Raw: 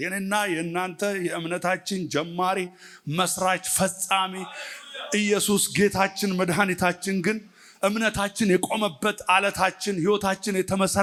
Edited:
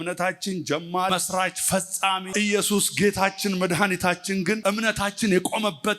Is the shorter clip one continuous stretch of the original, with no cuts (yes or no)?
no